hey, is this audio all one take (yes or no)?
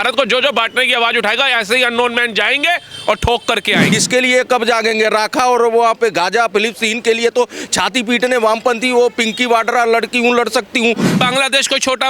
no